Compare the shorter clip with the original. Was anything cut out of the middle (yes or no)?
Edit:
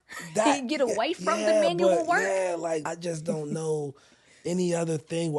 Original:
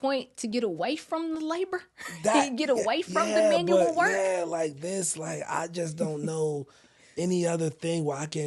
yes